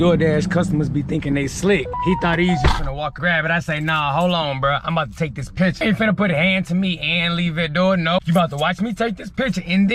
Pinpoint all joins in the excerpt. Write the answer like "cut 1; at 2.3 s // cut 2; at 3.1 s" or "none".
cut 1; at 1.9 s // cut 2; at 3.1 s // cut 3; at 5.8 s // cut 4; at 8.2 s